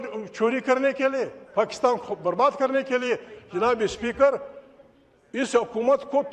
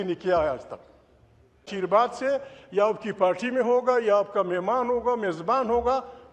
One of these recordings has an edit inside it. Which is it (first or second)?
second